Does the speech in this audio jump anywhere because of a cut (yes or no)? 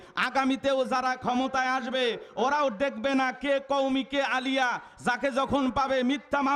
no